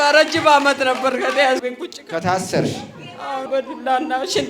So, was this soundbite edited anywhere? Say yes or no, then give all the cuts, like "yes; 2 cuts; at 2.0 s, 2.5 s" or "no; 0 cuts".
yes; 2 cuts; at 1.6 s, 3.5 s